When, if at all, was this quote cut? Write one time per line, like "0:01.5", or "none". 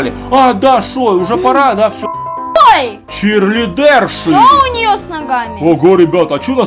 0:02.6